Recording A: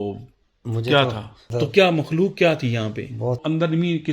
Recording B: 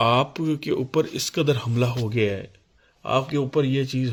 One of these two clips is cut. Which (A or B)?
A